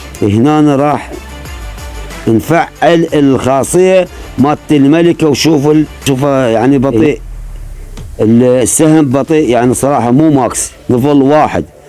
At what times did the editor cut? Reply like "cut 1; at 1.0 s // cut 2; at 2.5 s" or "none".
cut 1; at 6.0 s

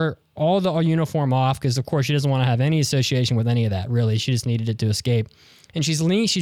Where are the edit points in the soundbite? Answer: none

